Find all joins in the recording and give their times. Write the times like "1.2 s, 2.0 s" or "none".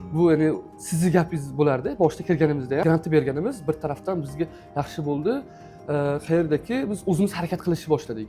2.8 s